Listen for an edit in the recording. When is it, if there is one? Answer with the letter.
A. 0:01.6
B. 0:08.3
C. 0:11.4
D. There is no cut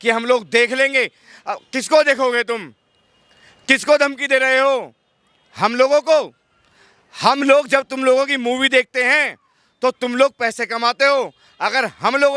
D